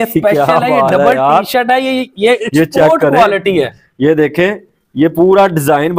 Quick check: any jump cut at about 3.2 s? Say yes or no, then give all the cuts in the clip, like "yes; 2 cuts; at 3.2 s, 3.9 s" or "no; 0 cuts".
no; 0 cuts